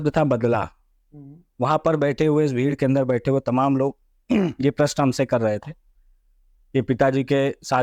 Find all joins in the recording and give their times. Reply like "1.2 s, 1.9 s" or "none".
none